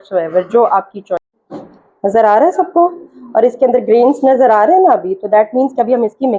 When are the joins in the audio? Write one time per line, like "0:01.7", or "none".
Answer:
0:01.3